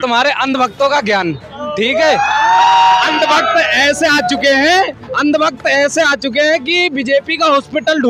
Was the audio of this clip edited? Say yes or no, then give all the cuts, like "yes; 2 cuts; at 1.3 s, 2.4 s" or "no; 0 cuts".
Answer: no; 0 cuts